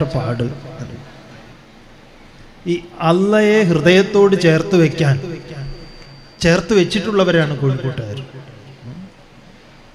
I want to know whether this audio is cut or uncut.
uncut